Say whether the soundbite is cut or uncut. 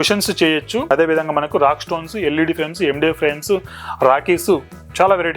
cut